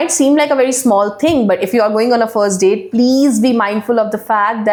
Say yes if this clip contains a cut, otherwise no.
no